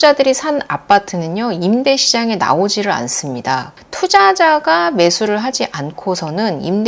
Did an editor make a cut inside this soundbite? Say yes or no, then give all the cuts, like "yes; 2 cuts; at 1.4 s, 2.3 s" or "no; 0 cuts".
yes; 1 cut; at 3.8 s